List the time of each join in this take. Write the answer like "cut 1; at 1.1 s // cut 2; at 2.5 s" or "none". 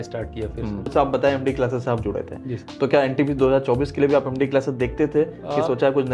cut 1; at 0.9 s